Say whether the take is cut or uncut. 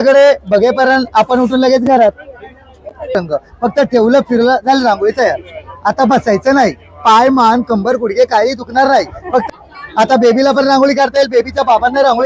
cut